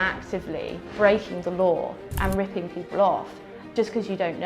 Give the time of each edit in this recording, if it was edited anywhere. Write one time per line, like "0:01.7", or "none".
0:02.1
0:03.7

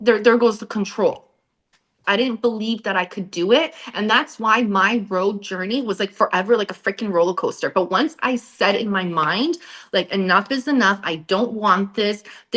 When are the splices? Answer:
0:02.0

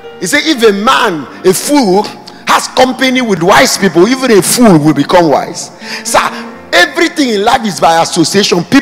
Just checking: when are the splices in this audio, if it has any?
0:03.4

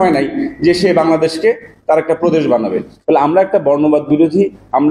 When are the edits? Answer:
0:02.9

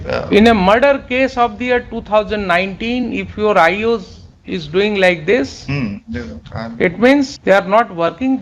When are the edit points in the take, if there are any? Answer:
0:07.4

